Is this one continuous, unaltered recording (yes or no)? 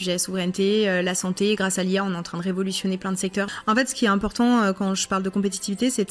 no